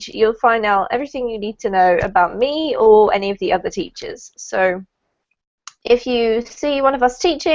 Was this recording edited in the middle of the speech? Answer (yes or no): yes